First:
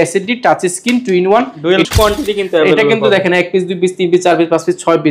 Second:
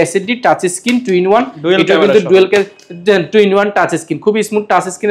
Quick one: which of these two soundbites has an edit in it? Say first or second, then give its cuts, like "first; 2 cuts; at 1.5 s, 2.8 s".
first; 1 cut; at 1.9 s